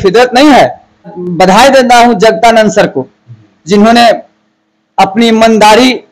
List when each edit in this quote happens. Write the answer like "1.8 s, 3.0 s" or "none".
1.2 s

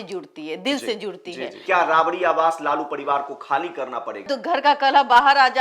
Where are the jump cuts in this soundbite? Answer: 1.5 s, 4.2 s

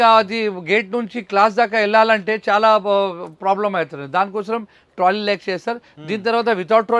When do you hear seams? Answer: none

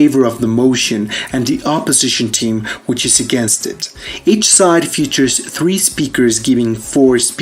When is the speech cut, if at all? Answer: none

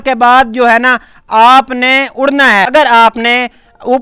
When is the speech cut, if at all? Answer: 2.7 s

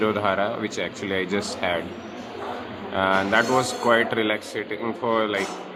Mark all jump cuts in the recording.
none

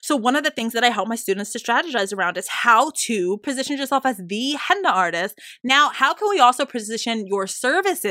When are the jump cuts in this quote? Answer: 3.4 s

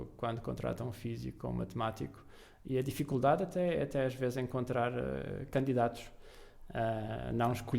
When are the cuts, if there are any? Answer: none

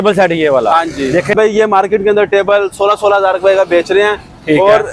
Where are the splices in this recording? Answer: 1.3 s

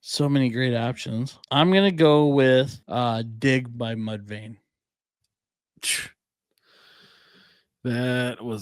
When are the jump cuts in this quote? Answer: 1.4 s, 2.8 s

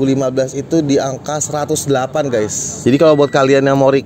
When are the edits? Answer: 2.6 s

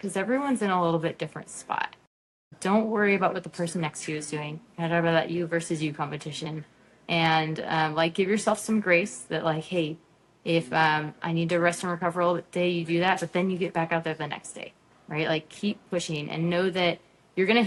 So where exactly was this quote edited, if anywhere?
none

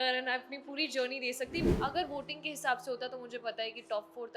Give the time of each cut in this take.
1.7 s

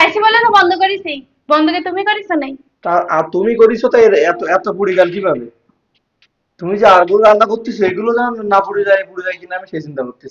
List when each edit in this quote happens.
none

